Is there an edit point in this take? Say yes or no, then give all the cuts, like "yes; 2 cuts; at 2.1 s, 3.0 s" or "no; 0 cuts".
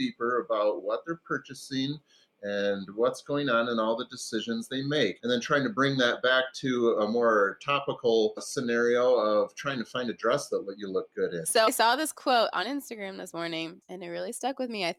no; 0 cuts